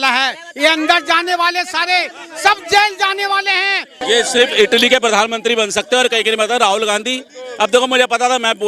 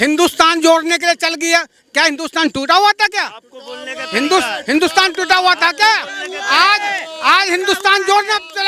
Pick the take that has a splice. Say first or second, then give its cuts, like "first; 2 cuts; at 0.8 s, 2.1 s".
first; 1 cut; at 4.0 s